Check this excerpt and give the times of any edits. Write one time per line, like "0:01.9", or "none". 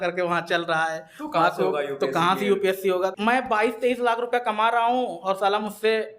0:03.1